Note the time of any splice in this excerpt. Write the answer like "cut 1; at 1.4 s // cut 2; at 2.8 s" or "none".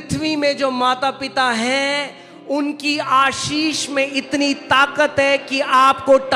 none